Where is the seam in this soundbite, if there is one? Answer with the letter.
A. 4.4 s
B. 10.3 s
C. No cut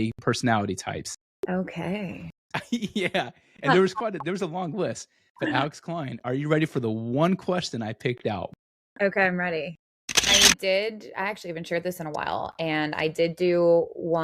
B